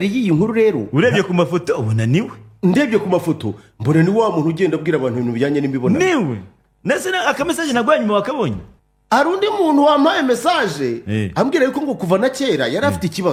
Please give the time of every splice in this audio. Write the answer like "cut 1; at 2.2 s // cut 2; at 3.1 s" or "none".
none

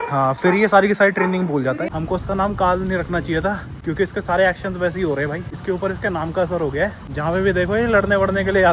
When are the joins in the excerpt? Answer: cut 1; at 1.9 s // cut 2; at 3.7 s // cut 3; at 5.5 s // cut 4; at 7.1 s

